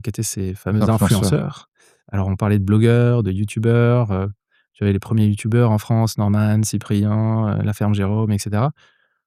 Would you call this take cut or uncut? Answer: uncut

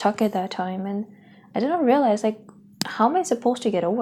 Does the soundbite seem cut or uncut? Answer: uncut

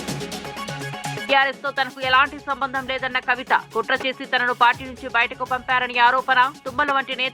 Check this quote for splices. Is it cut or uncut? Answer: cut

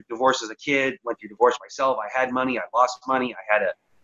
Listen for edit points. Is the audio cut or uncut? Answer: uncut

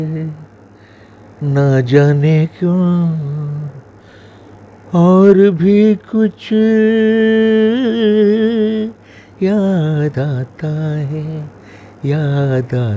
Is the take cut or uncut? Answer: uncut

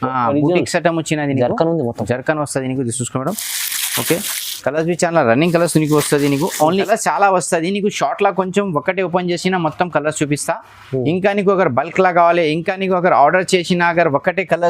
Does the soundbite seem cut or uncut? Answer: cut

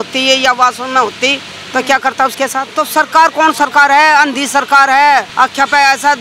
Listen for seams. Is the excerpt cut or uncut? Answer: cut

